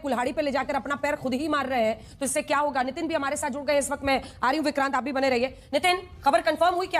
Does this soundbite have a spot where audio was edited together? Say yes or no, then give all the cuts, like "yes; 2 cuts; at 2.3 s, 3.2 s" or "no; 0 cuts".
no; 0 cuts